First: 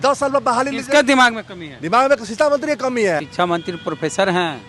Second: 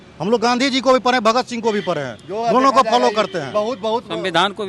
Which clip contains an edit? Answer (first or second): first